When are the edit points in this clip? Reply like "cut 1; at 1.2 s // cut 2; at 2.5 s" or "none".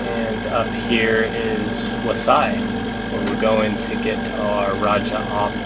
cut 1; at 1.7 s